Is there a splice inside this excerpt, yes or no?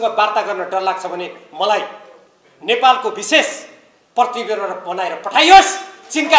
no